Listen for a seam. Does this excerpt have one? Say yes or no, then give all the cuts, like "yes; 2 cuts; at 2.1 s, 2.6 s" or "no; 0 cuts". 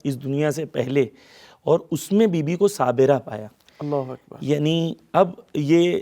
no; 0 cuts